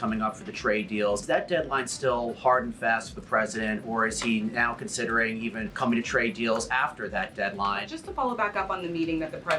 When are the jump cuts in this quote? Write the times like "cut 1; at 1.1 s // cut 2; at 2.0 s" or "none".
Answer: cut 1; at 1.2 s // cut 2; at 5.7 s // cut 3; at 7.8 s